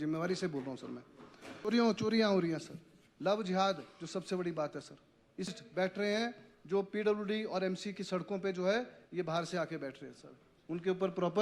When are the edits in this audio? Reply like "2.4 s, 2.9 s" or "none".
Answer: 1.5 s, 5.5 s